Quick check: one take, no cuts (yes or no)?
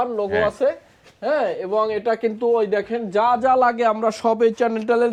yes